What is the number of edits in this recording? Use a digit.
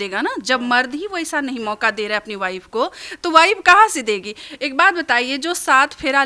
0